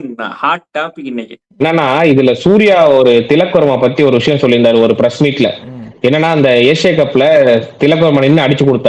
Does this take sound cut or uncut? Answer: cut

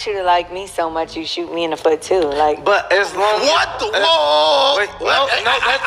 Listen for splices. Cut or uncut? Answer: uncut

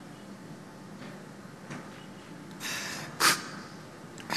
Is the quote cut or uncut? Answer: uncut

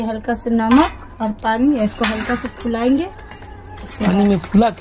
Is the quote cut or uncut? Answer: uncut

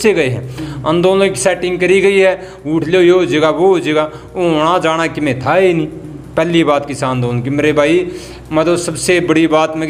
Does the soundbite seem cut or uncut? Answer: uncut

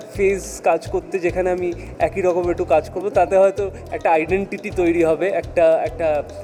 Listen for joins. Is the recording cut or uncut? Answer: uncut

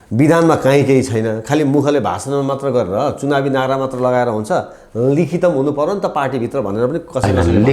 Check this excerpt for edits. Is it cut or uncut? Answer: uncut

